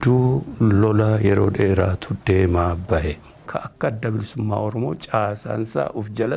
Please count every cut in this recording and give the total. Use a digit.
1